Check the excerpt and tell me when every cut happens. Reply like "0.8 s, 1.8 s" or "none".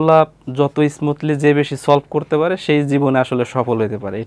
none

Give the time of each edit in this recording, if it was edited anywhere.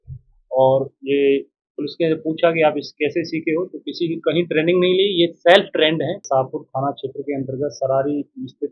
6.2 s

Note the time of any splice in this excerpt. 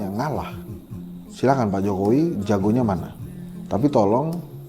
none

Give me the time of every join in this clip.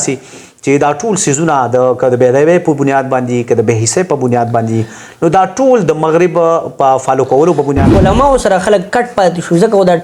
7.9 s

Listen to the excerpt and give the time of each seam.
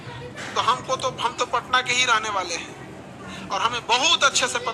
none

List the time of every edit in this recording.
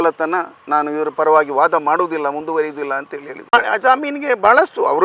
3.5 s

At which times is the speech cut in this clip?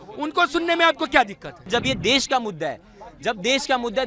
1.7 s

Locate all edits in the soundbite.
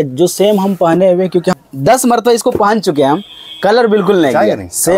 1.5 s

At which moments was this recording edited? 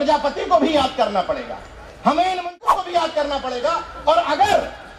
2.5 s

